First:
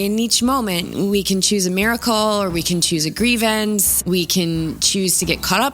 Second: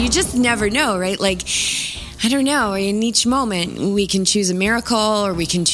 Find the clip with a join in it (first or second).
first